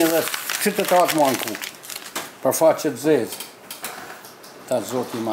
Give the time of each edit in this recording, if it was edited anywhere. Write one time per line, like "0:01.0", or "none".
none